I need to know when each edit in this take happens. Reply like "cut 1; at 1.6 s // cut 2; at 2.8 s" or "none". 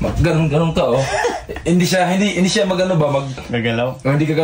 cut 1; at 3.5 s